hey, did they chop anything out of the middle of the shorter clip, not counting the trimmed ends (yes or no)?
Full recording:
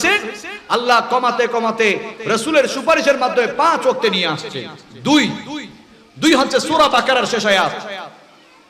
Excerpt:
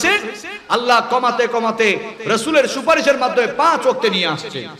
no